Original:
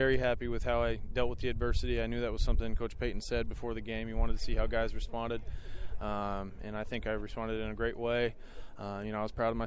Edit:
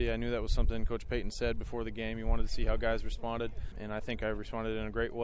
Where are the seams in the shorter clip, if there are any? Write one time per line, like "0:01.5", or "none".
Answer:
0:03.7